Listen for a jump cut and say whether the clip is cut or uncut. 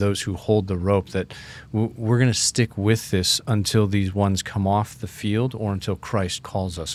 uncut